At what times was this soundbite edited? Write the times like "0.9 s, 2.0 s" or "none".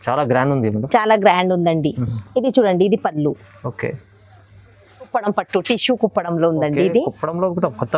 5.1 s